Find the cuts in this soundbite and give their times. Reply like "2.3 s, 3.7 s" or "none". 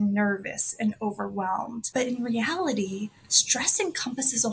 none